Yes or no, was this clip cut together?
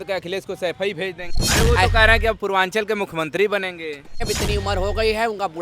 yes